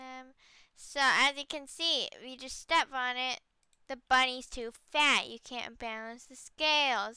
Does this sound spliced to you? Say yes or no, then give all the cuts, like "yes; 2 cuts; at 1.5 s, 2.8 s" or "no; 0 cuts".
no; 0 cuts